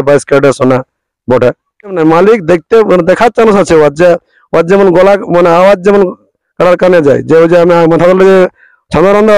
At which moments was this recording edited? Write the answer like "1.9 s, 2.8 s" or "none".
2.0 s

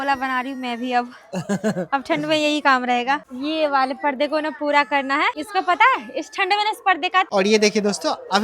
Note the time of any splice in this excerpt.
3.3 s, 5.3 s, 7.3 s

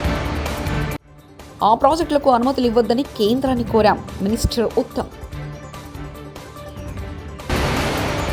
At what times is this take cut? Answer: none

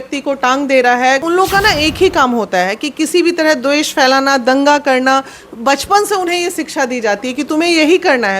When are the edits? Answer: 1.2 s

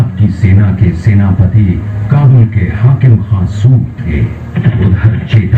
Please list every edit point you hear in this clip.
4.6 s

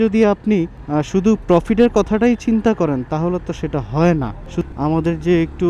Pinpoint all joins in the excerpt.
4.6 s

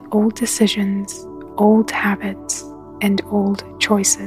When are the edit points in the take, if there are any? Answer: none

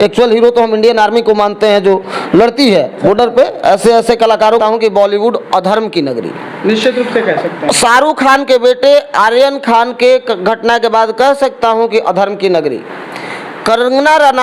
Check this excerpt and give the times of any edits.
4.6 s

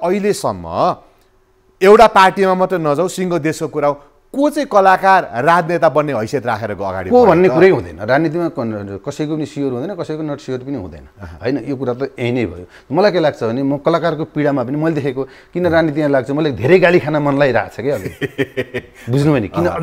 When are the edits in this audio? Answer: none

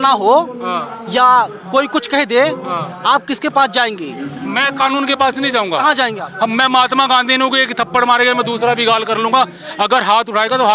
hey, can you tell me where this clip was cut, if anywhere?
none

